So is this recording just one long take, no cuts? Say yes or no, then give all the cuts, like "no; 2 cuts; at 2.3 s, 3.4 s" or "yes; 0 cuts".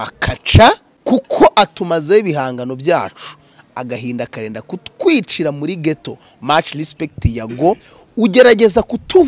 no; 1 cut; at 0.9 s